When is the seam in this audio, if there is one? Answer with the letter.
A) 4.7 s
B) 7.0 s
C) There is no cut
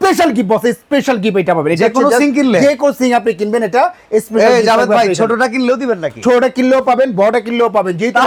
C